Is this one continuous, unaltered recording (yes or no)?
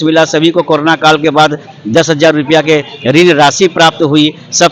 yes